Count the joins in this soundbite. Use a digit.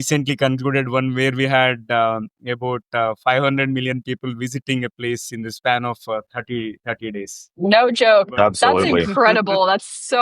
1